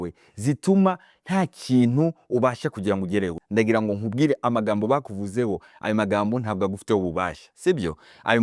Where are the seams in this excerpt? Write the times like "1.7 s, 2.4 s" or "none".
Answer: 3.4 s